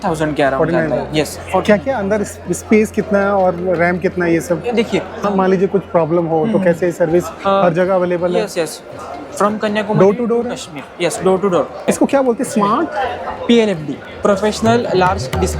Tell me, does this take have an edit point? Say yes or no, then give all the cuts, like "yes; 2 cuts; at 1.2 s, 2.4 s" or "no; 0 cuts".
yes; 2 cuts; at 5.3 s, 11.9 s